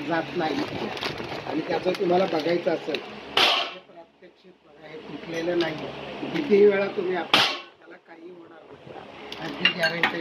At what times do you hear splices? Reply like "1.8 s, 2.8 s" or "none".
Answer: none